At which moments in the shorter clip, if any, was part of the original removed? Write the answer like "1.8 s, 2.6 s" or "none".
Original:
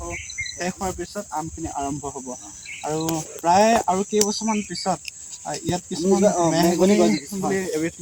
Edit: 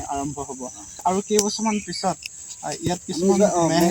1.0 s